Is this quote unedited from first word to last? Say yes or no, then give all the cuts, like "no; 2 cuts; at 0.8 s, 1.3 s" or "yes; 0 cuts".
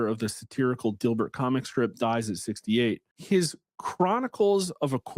no; 1 cut; at 3.1 s